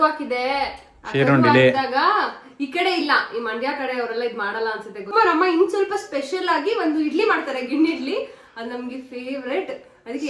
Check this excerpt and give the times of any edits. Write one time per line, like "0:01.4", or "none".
0:05.1